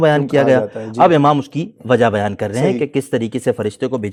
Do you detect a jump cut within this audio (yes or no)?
no